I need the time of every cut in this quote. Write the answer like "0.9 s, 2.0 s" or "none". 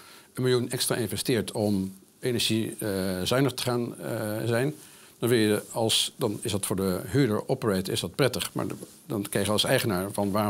none

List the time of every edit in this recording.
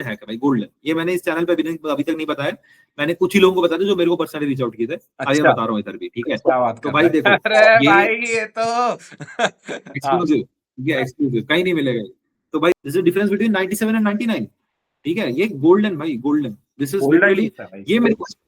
12.7 s

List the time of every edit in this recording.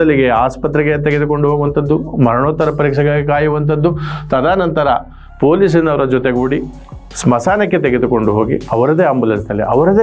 none

